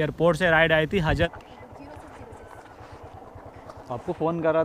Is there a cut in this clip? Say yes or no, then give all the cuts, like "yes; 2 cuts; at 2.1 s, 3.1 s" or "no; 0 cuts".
yes; 1 cut; at 1.3 s